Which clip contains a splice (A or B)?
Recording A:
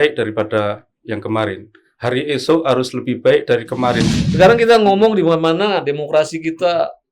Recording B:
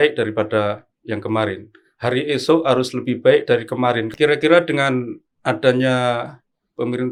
A